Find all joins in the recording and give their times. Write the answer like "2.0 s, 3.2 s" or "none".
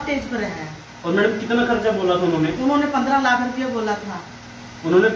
none